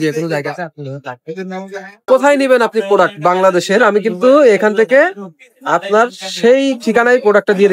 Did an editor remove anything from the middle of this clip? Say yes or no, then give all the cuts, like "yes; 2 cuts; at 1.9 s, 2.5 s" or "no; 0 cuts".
yes; 1 cut; at 2.0 s